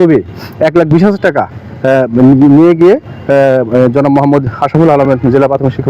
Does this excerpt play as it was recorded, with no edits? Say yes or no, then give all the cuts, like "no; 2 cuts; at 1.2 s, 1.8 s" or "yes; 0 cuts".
yes; 0 cuts